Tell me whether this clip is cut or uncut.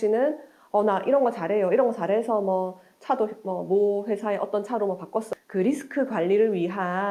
cut